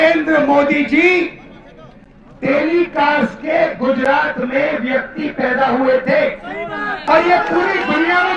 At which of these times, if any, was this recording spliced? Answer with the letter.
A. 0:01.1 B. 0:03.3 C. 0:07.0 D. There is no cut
C